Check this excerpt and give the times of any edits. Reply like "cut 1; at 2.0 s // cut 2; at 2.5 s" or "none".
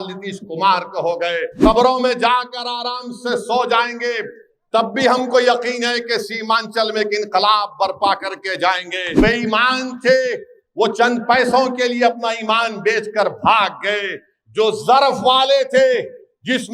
cut 1; at 1.6 s // cut 2; at 9.2 s